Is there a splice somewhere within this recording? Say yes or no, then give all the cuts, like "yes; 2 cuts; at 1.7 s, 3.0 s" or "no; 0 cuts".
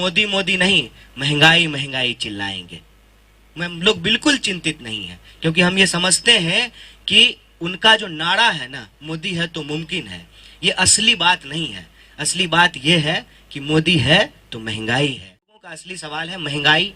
yes; 1 cut; at 15.7 s